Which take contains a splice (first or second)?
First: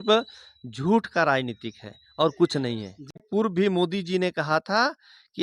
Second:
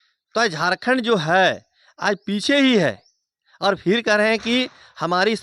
first